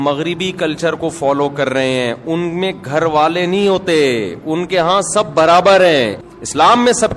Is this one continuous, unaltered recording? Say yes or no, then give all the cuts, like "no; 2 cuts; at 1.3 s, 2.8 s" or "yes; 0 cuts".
no; 1 cut; at 6.2 s